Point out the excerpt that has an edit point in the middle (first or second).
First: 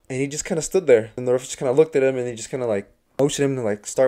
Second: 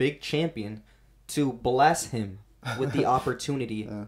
first